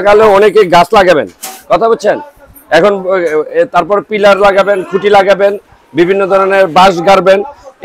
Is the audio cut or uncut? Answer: uncut